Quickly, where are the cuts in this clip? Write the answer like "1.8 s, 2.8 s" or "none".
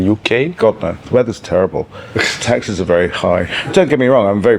1.0 s, 3.6 s